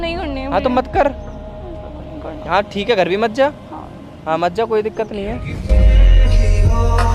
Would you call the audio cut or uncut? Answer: uncut